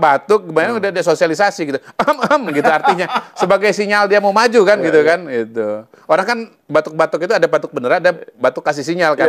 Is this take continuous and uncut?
yes; 0 cuts

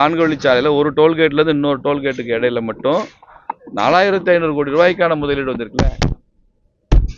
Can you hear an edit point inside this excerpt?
no; 0 cuts

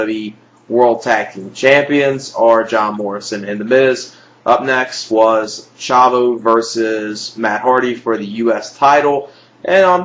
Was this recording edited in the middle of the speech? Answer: yes; 1 cut; at 3.1 s

